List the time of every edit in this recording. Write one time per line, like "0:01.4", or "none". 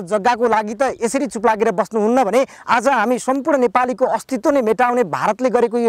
none